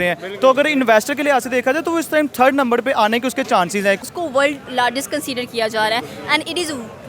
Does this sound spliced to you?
yes; 1 cut; at 4.0 s

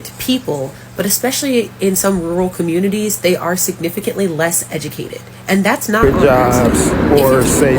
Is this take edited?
yes; 1 cut; at 6.0 s

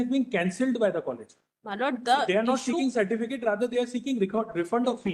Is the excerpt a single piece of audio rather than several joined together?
yes; 0 cuts

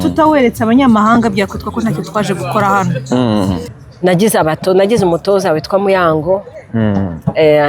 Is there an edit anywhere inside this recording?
yes; 1 cut; at 3.8 s

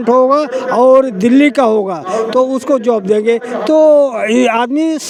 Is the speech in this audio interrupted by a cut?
no; 0 cuts

